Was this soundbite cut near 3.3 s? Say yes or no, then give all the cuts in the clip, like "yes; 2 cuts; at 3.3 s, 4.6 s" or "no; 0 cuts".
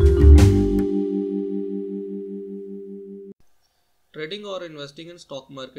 yes; 1 cut; at 3.3 s